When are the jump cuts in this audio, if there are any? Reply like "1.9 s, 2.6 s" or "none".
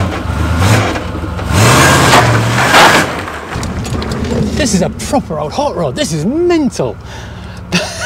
none